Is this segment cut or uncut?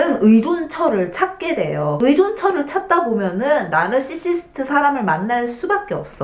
cut